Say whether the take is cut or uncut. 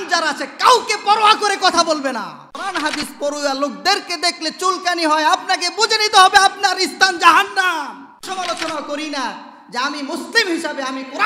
cut